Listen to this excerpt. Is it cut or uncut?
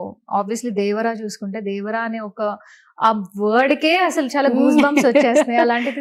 uncut